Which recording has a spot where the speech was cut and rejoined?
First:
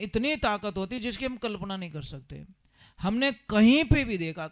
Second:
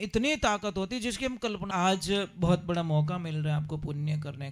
second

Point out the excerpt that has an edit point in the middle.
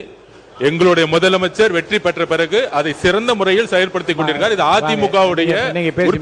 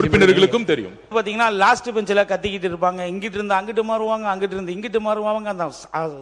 second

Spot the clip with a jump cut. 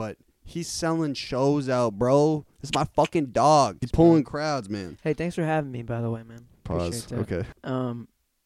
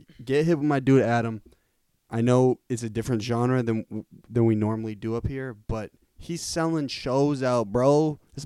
first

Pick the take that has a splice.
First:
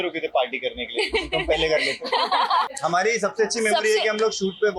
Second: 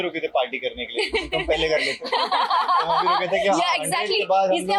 first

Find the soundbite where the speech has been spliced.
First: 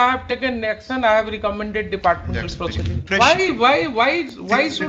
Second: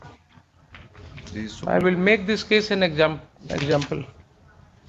first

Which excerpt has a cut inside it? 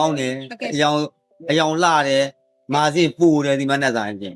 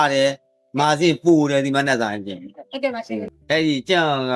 second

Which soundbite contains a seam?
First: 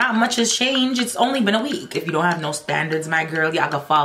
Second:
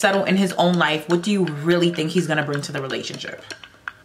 first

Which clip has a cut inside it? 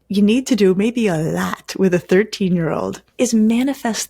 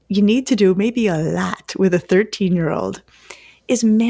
first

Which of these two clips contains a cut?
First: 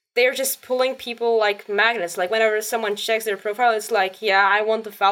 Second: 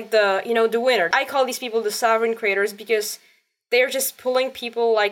second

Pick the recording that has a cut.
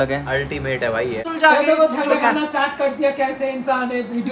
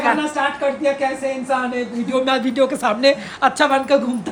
first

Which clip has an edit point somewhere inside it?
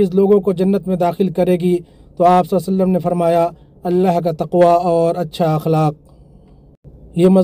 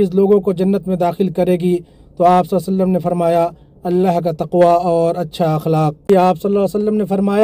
second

